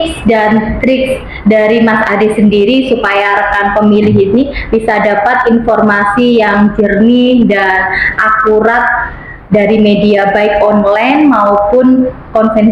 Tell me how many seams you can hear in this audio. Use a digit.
0